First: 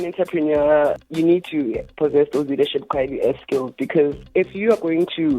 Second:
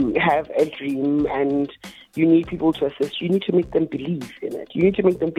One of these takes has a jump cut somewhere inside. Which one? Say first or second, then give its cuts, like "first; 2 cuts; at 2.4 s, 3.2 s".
first; 2 cuts; at 1.0 s, 4.2 s